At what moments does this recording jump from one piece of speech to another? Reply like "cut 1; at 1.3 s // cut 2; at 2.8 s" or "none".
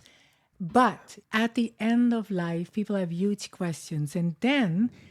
cut 1; at 1.1 s